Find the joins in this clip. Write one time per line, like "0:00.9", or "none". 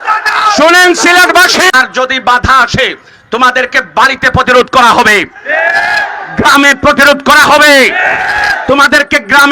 0:01.7